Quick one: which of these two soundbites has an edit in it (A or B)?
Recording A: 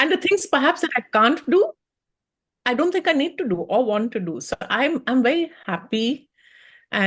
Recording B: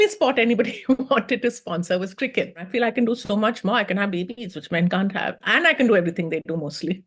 B